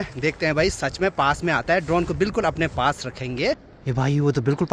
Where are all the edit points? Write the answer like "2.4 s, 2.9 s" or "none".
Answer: 3.7 s